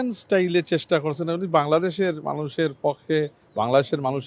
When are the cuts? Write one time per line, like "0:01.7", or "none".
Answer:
none